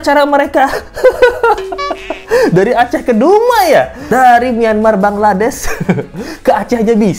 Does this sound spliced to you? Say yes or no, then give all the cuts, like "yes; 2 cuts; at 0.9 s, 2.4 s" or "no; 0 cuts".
no; 0 cuts